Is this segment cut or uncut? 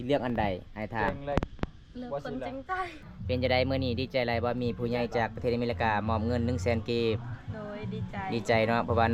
cut